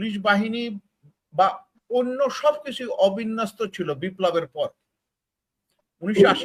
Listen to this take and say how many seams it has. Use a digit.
0